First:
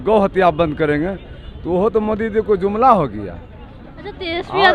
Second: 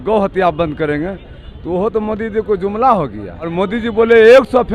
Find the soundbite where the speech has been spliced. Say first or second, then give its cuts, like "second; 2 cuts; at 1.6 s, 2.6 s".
second; 1 cut; at 3.5 s